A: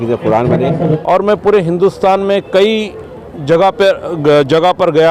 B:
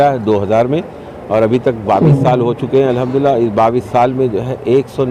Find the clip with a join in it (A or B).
A